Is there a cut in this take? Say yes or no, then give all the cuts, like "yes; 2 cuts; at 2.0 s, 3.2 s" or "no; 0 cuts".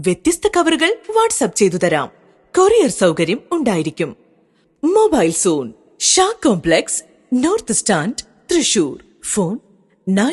yes; 1 cut; at 1.0 s